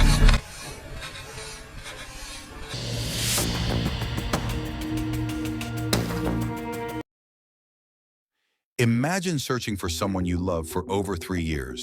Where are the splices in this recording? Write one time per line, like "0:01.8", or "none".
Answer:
0:02.7